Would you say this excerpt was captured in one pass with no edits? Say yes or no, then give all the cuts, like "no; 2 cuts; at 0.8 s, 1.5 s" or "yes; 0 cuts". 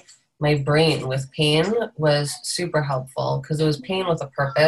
yes; 0 cuts